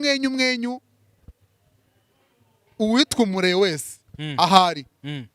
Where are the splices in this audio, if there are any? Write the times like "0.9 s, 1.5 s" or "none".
none